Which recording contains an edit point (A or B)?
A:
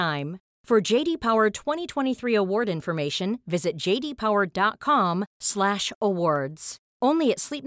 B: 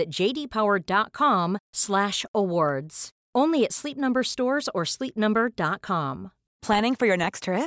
B